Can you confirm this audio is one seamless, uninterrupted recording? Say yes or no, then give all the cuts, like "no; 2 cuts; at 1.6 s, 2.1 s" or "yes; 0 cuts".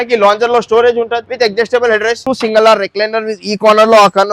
no; 2 cuts; at 1.2 s, 2.2 s